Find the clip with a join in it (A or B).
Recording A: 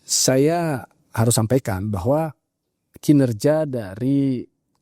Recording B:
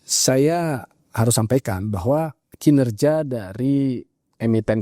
B